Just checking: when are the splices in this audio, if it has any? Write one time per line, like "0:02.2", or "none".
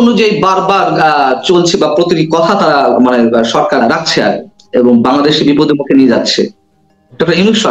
0:03.8